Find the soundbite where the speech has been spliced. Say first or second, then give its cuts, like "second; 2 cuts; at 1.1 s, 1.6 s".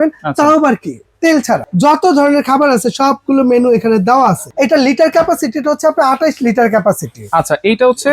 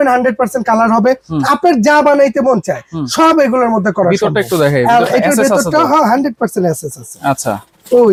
first; 2 cuts; at 1.7 s, 4.5 s